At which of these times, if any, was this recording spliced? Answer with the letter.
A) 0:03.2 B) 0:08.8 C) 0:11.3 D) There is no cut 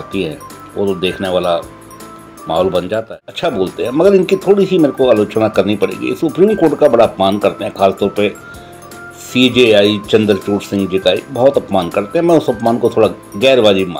A